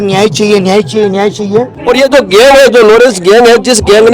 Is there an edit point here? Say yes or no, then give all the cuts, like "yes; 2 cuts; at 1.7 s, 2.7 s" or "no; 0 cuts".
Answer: yes; 1 cut; at 1.7 s